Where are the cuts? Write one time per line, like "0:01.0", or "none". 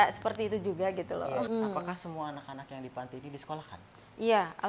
0:01.5